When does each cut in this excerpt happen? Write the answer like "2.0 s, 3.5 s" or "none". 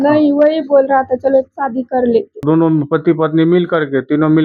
2.5 s